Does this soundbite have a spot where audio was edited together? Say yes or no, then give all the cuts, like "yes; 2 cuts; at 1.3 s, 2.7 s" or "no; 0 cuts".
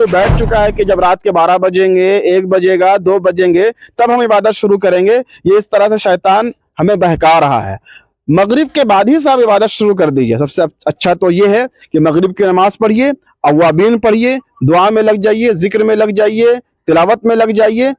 no; 0 cuts